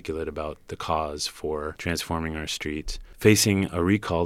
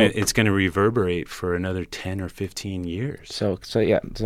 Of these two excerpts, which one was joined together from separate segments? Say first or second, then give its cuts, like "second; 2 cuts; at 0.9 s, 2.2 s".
first; 2 cuts; at 1.8 s, 3.0 s